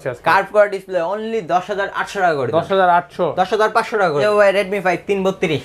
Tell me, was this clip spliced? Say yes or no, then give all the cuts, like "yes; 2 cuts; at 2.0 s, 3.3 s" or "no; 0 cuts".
no; 0 cuts